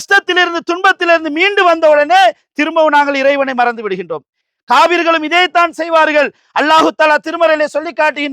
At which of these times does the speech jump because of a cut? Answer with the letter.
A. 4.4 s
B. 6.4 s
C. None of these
A